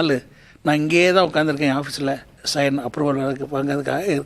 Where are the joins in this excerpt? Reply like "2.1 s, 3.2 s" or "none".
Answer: 2.3 s